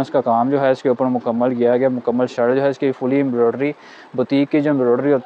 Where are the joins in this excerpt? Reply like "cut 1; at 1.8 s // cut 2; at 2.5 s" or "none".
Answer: none